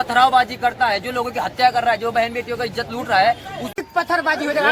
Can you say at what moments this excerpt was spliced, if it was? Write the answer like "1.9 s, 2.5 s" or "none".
3.7 s